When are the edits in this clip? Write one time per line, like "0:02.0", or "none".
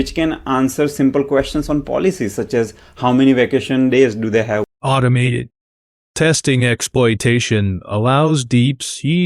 none

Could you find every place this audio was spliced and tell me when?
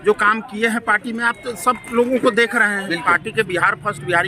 0:03.0

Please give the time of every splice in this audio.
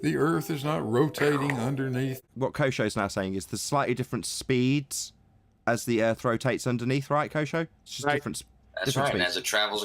0:02.3

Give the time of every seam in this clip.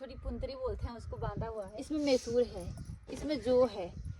0:01.8

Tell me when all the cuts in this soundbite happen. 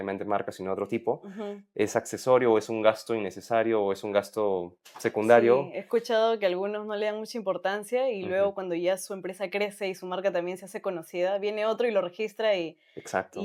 none

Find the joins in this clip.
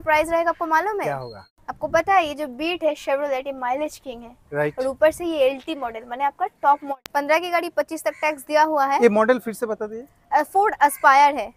0:01.5
0:06.8

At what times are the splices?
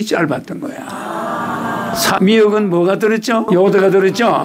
0:02.2
0:03.5

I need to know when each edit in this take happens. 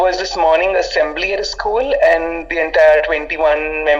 none

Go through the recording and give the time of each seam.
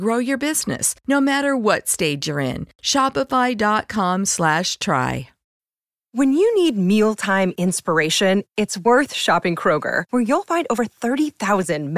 0:05.4

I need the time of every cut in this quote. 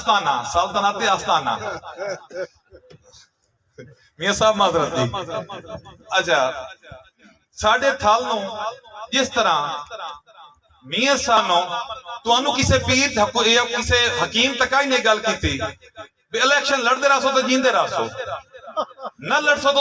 0:11.4

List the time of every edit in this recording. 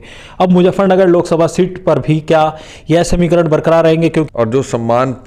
0:04.3

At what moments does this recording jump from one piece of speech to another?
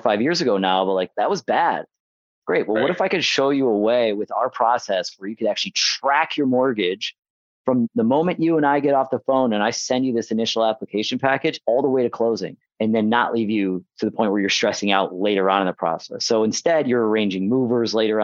0:12.5

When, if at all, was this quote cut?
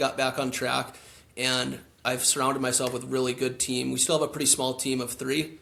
none

